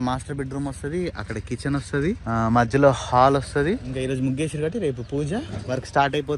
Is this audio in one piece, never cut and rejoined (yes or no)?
no